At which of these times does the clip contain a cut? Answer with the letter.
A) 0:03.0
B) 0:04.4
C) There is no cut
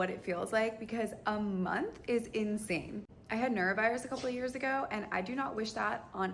C